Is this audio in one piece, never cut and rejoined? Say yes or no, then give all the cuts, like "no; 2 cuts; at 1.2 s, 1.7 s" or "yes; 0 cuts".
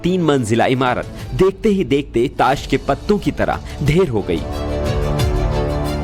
yes; 0 cuts